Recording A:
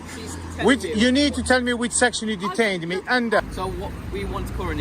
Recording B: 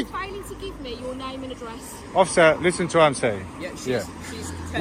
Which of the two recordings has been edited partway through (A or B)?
A